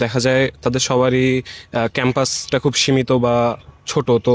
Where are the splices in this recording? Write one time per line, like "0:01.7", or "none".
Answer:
none